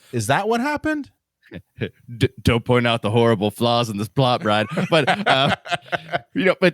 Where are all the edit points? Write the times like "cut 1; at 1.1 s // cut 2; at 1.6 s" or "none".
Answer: cut 1; at 1.4 s